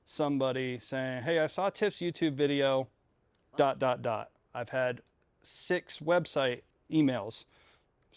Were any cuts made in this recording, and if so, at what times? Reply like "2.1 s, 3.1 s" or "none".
6.7 s